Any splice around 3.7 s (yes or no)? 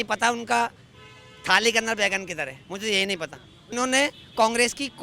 yes